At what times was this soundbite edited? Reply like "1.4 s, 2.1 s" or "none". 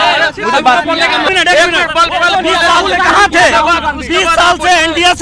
1.3 s